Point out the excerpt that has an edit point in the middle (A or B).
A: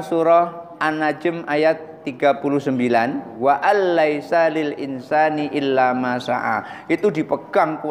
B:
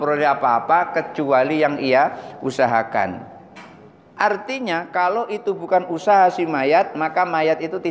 A